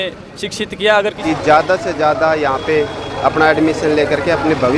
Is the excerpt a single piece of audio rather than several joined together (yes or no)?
no